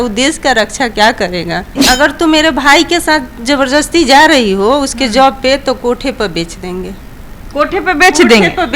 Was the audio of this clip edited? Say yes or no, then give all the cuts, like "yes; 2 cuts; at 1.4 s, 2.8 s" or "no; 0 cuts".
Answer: yes; 1 cut; at 1.7 s